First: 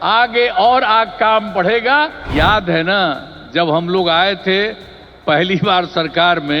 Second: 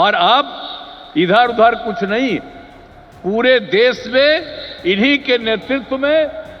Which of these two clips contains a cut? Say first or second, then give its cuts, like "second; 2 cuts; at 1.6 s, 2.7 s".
first; 1 cut; at 2.2 s